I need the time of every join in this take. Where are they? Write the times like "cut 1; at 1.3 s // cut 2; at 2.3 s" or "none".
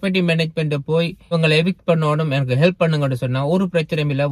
cut 1; at 1.3 s